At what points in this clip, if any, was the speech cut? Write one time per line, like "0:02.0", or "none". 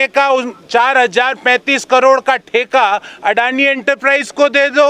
none